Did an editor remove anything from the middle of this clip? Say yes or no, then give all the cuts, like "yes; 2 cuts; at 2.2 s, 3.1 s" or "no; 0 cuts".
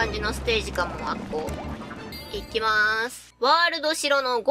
yes; 2 cuts; at 2.2 s, 3.2 s